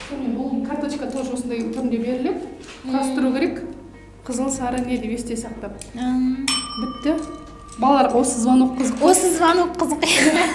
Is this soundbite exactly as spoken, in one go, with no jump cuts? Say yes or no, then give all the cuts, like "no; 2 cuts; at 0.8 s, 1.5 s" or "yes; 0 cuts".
yes; 0 cuts